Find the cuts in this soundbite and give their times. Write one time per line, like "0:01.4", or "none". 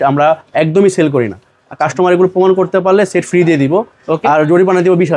none